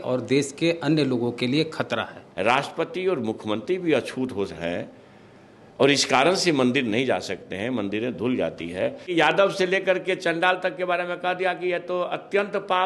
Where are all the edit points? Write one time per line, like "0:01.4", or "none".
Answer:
0:02.2
0:09.1